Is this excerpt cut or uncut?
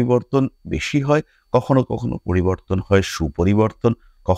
uncut